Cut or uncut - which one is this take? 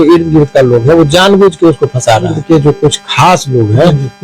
cut